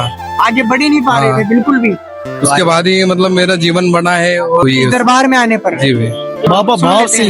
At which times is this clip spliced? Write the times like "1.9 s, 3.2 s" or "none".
2.3 s, 4.6 s, 6.5 s